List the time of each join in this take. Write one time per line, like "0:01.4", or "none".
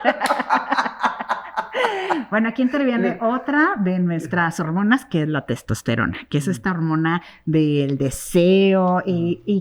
none